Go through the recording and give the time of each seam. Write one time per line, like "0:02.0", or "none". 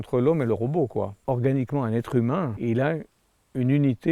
0:01.2
0:02.5